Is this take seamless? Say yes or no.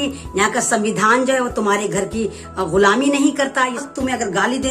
no